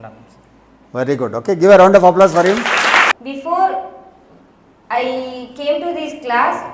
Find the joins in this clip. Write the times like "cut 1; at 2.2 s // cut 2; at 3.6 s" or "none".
cut 1; at 3.1 s

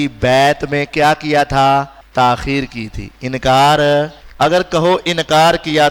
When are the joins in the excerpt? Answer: cut 1; at 2.0 s // cut 2; at 4.2 s

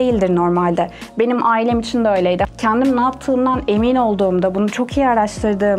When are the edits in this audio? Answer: cut 1; at 2.5 s

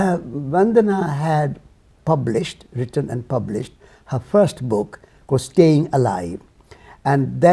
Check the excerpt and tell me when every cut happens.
cut 1; at 1.9 s

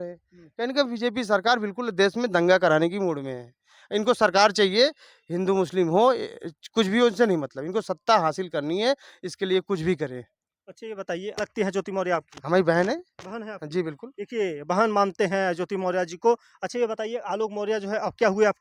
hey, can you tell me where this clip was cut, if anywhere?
cut 1; at 11.4 s

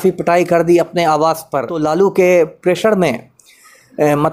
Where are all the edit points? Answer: cut 1; at 1.7 s

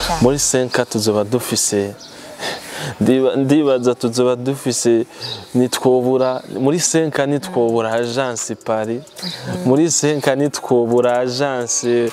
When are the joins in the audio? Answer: none

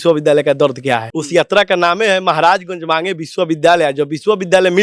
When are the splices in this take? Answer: cut 1; at 1.1 s

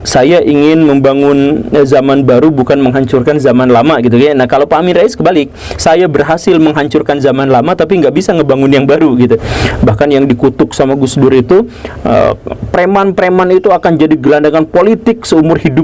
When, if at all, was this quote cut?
cut 1; at 9.5 s

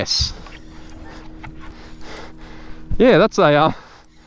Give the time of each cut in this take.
cut 1; at 1.7 s

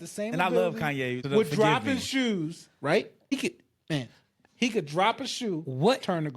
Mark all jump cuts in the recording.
cut 1; at 1.2 s // cut 2; at 3.3 s

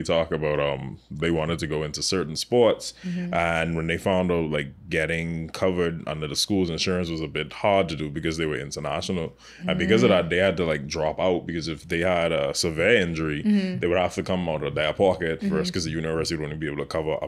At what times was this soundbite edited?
none

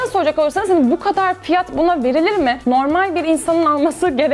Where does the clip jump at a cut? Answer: none

